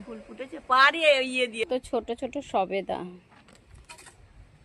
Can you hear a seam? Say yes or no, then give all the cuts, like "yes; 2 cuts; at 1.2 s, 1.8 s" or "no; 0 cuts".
yes; 1 cut; at 1.7 s